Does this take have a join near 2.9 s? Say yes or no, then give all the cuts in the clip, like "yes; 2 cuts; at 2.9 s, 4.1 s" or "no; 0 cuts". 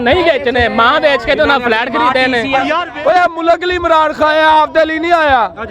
yes; 1 cut; at 2.9 s